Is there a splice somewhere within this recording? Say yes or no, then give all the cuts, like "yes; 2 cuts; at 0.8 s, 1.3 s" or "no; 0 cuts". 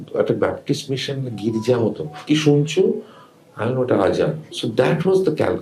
yes; 1 cut; at 4.5 s